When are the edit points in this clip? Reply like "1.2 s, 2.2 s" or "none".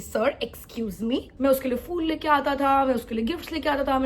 1.4 s